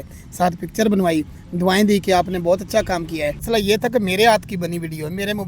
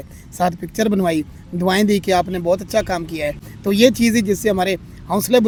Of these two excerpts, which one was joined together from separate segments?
first; 1 cut; at 3.4 s

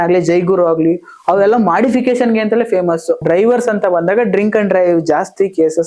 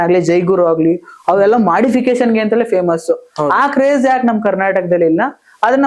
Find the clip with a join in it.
first; 1 cut; at 3.2 s

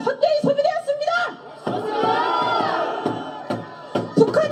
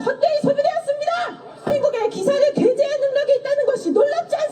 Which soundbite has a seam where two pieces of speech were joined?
second; 1 cut; at 1.7 s

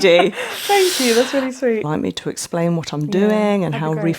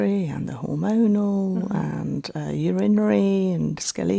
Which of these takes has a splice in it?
first; 1 cut; at 1.8 s

